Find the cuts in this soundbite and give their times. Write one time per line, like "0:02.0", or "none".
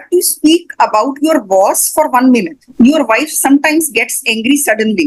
0:02.7